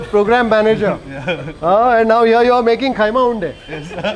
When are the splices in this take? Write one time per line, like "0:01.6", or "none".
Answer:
none